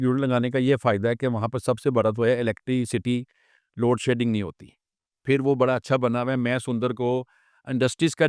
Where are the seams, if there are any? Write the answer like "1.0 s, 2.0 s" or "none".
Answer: none